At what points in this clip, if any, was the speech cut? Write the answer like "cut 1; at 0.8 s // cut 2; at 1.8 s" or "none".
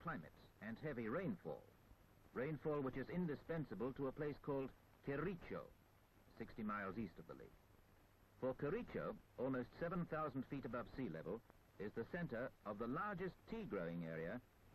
cut 1; at 9.0 s